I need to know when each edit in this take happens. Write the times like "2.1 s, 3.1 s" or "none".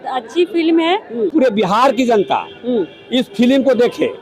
1.3 s